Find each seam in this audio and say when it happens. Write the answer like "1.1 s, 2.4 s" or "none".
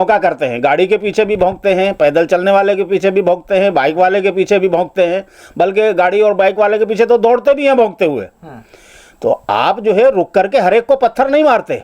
none